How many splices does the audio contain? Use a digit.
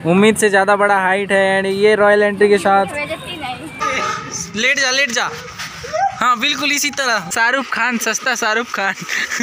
2